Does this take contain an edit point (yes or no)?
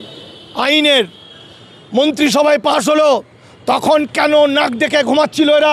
no